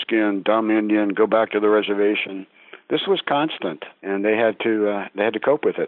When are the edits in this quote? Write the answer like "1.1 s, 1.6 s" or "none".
3.9 s